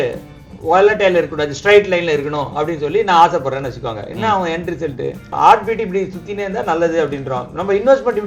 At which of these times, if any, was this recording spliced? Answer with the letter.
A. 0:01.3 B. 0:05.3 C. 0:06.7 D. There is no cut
B